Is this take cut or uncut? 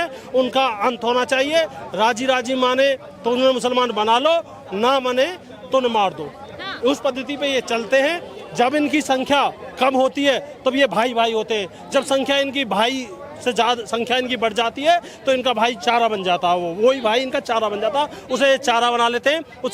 uncut